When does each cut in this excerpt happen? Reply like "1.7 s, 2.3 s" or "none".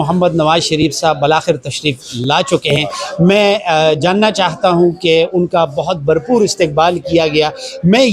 none